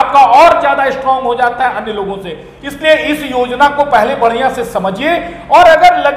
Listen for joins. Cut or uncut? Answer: uncut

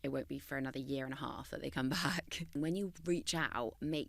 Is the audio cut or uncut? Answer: cut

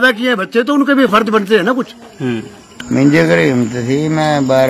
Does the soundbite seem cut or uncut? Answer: cut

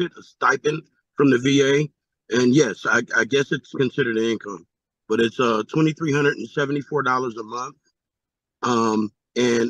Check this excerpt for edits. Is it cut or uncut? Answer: uncut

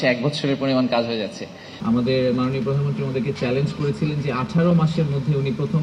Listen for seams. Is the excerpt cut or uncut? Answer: cut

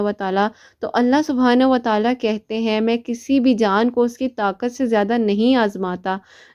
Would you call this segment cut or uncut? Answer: uncut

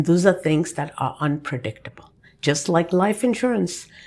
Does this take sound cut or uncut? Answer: uncut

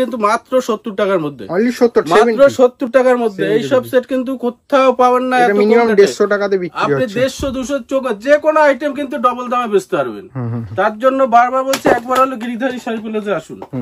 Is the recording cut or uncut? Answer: uncut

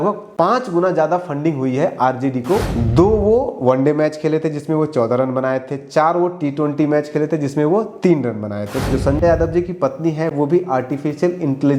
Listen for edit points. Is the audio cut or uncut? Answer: cut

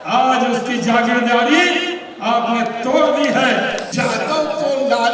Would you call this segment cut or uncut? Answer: cut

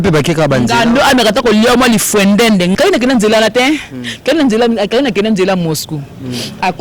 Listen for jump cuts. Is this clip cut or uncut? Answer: cut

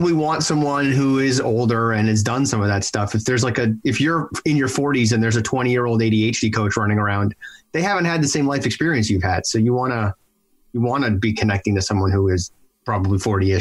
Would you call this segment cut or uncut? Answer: cut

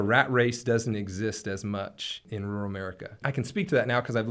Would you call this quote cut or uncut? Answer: cut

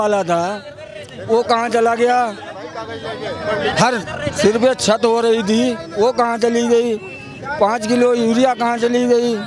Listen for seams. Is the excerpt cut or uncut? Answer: uncut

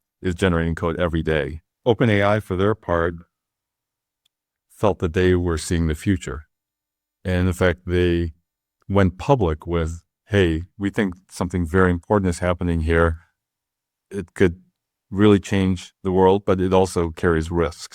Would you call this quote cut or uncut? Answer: cut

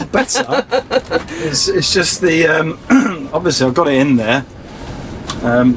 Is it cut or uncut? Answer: uncut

